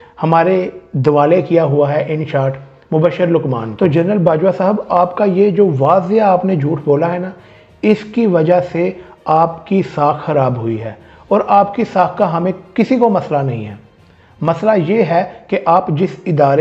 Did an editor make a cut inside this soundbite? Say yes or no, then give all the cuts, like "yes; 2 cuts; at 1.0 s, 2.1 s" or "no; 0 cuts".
yes; 1 cut; at 3.7 s